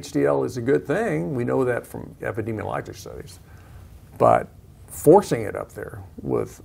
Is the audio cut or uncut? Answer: cut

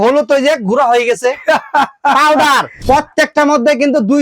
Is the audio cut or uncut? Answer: cut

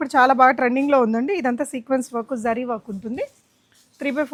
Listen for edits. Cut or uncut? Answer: uncut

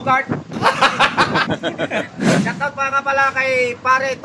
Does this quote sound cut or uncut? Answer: cut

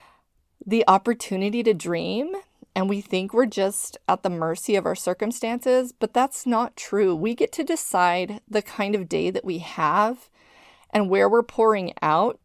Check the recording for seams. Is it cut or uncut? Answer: uncut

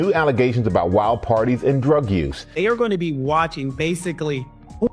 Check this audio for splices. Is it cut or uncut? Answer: cut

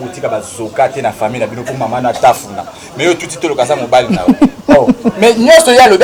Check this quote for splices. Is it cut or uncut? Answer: uncut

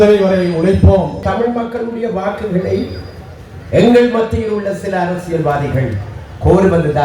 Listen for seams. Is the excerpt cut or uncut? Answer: cut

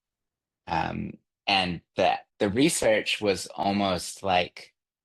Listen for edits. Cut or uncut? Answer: cut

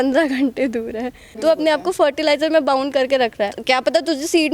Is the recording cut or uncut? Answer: cut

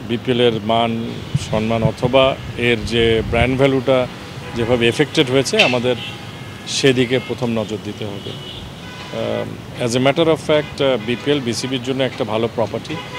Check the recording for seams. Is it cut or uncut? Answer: uncut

